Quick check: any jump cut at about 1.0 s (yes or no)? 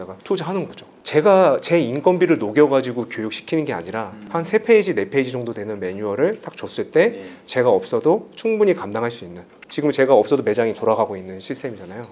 yes